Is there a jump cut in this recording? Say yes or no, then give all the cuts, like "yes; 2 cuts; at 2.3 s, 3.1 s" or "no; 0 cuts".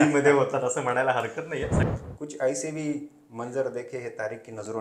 yes; 1 cut; at 1.8 s